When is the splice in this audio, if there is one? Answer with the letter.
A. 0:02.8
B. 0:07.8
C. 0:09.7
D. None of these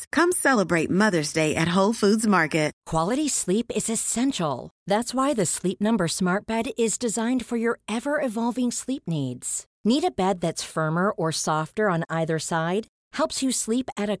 A